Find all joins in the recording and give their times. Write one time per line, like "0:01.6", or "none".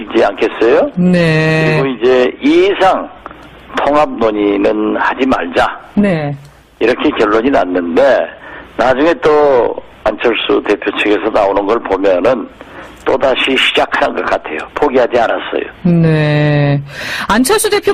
0:15.7